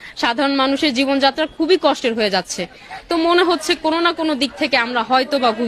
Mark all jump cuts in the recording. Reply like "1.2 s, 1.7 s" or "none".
none